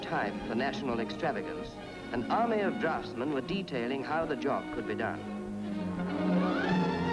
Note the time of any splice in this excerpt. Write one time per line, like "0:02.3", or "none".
0:01.1